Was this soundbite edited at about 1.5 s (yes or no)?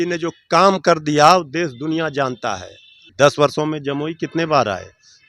no